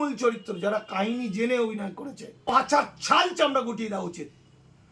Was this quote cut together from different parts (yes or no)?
yes